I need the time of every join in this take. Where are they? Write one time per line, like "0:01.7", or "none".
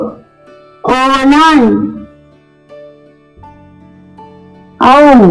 0:02.1
0:04.6